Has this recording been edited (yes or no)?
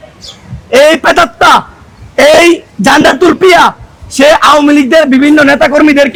no